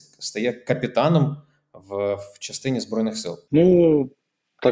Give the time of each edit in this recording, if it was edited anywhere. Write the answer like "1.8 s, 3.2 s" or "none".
3.4 s